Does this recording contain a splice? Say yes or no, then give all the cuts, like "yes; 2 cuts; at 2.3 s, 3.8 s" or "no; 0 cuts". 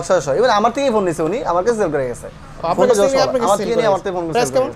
no; 0 cuts